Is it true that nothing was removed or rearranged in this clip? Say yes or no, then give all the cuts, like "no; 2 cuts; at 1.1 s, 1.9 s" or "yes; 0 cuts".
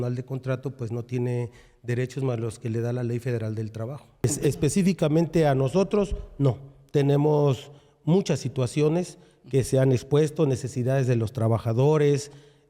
no; 1 cut; at 4.2 s